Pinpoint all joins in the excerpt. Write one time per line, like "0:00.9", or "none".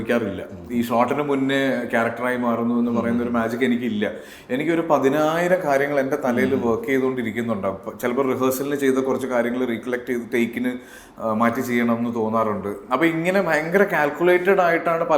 none